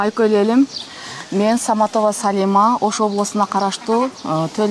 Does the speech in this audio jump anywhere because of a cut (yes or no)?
no